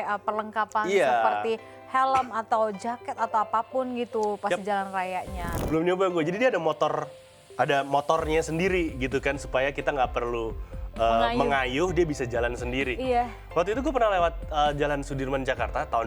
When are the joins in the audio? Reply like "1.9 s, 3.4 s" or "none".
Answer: 5.4 s